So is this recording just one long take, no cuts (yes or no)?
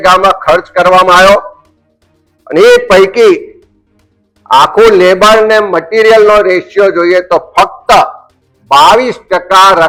yes